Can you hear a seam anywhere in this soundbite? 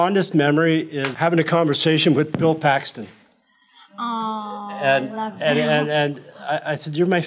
yes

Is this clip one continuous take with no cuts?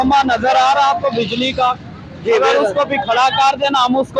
yes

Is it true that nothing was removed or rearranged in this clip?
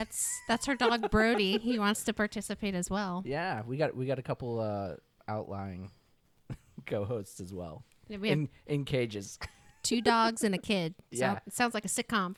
yes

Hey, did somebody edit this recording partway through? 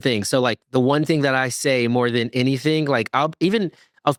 no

